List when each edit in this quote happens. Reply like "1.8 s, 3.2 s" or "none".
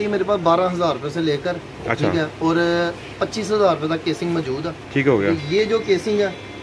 none